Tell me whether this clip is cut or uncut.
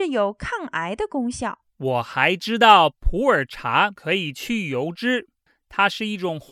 cut